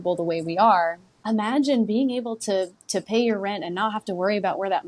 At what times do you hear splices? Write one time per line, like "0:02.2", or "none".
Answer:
0:01.1